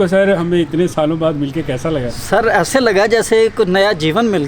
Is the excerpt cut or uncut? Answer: cut